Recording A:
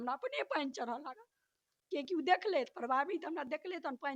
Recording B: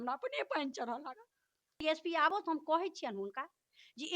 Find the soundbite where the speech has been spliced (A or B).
B